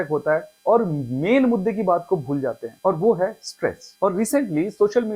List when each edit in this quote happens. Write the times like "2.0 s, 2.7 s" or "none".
none

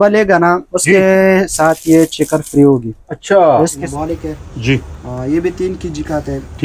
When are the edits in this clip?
3.8 s

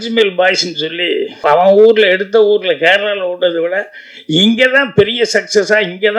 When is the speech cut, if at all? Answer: 1.4 s

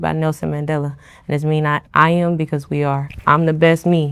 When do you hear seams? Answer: 1.8 s, 3.1 s

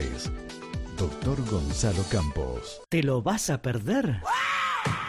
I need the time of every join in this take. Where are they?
2.7 s

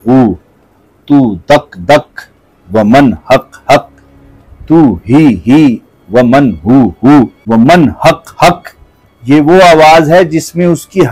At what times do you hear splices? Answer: 7.4 s

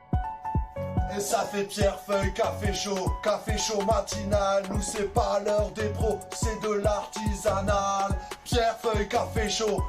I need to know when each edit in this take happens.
1.0 s

